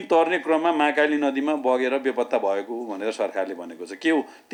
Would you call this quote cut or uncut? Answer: uncut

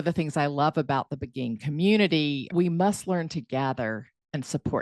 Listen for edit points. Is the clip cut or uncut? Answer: uncut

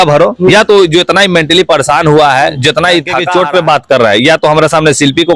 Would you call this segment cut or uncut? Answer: cut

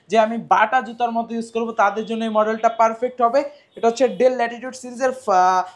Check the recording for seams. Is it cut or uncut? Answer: uncut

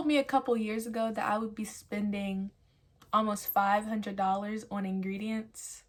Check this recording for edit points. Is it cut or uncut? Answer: uncut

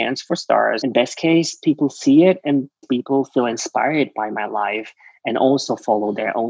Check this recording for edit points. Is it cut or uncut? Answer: cut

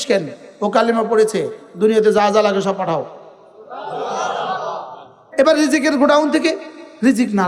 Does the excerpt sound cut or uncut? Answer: uncut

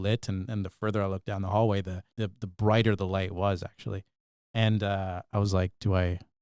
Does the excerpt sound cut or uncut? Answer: cut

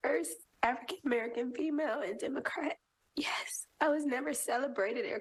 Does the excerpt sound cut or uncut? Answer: uncut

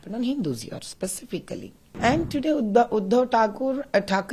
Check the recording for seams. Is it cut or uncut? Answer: cut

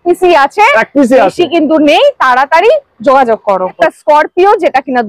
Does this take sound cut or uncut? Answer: cut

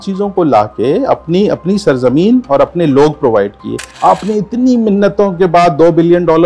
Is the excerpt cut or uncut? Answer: cut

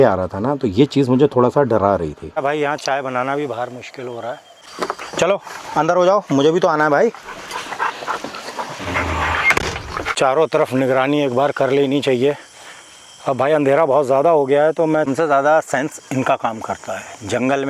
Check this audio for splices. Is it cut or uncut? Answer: cut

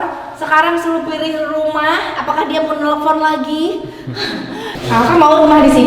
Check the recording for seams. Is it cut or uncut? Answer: cut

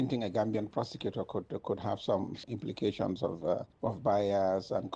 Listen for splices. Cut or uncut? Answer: uncut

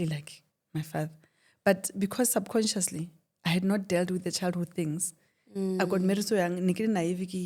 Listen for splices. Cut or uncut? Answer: uncut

